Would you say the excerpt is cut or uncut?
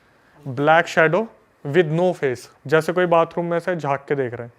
cut